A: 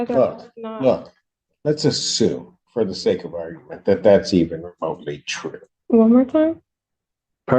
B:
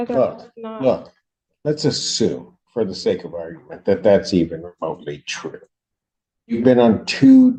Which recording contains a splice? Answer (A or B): A